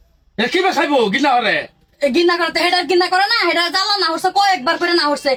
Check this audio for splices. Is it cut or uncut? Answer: uncut